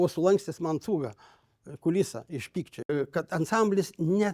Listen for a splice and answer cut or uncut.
cut